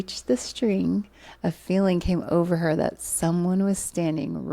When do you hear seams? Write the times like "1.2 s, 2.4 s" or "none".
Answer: none